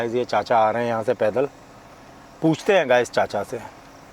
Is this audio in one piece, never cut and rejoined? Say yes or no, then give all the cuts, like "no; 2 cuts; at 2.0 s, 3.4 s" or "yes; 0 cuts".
yes; 0 cuts